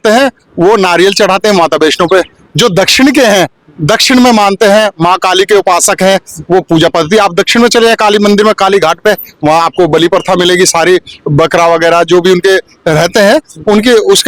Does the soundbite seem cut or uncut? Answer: uncut